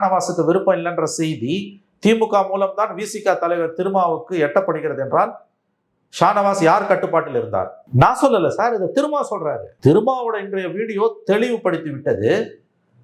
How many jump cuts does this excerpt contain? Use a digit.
2